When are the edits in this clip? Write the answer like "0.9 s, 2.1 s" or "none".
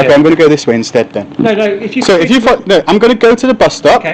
none